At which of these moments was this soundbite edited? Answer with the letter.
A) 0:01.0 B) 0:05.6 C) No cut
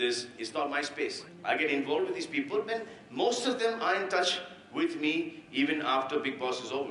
B